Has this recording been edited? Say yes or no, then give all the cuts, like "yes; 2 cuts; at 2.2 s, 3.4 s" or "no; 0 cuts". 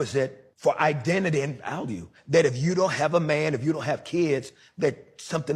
no; 0 cuts